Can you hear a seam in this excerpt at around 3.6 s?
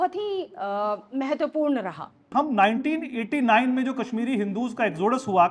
no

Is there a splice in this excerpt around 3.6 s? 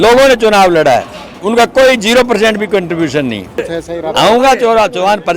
yes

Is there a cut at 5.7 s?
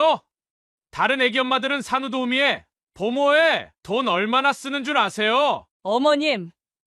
yes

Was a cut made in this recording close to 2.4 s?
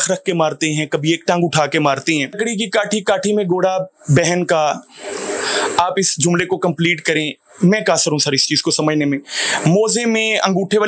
yes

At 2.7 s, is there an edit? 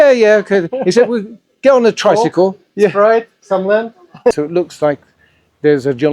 no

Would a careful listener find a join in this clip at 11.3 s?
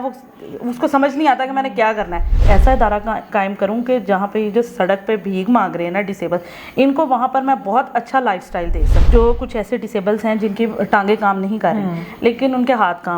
no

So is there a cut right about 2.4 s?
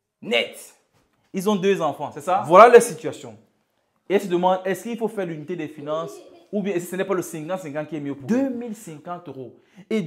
yes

